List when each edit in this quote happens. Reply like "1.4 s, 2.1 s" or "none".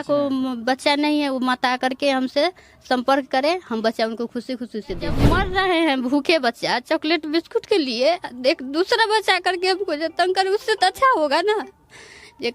5.2 s